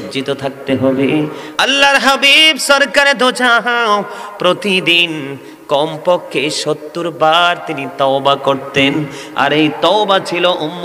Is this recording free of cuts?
no; 1 cut; at 1.4 s

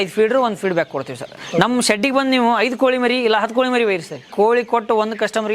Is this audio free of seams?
no; 2 cuts; at 1.4 s, 4.3 s

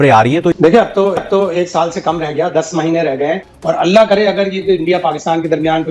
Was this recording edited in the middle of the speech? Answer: yes; 1 cut; at 3.5 s

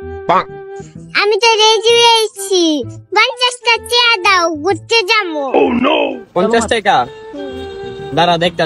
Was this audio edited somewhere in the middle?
no; 0 cuts

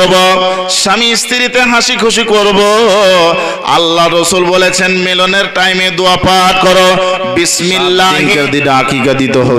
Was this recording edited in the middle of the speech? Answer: yes; 1 cut; at 8.2 s

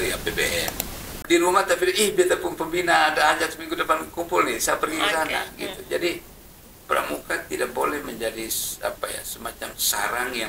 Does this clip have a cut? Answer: yes; 1 cut; at 1.2 s

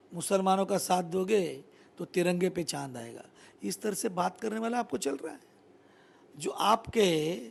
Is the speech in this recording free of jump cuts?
yes; 0 cuts

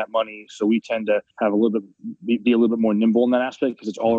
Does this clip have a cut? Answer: yes; 1 cut; at 1.3 s

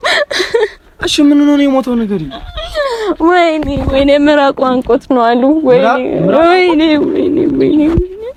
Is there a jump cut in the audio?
no; 0 cuts

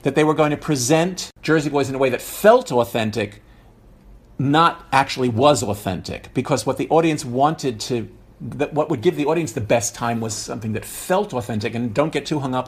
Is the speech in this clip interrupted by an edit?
yes; 1 cut; at 1.3 s

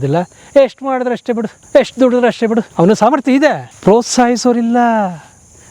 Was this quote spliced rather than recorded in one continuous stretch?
yes; 3 cuts; at 1.5 s, 2.7 s, 3.7 s

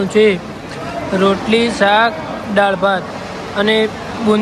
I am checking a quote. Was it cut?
no; 0 cuts

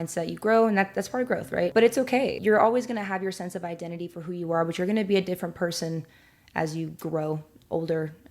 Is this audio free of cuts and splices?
no; 2 cuts; at 1.7 s, 2.4 s

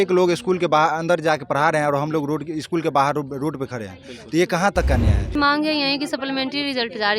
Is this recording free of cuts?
no; 1 cut; at 5.3 s

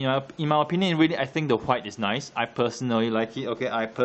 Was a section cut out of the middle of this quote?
no; 0 cuts

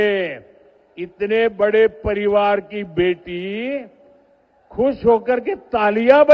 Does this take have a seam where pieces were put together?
no; 0 cuts

